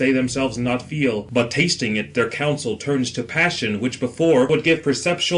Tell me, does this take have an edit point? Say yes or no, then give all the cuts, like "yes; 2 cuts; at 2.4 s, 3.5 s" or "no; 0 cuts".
no; 0 cuts